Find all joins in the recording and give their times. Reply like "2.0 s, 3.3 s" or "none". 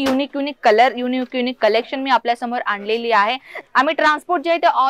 3.5 s